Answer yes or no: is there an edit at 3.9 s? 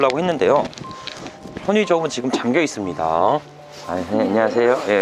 yes